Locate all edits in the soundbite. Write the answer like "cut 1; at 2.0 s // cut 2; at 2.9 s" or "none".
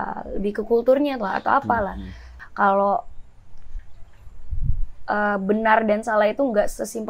cut 1; at 2.3 s